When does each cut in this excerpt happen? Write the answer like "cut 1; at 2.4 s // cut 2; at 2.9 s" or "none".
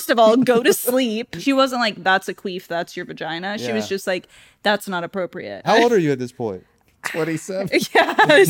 cut 1; at 1.3 s // cut 2; at 5.5 s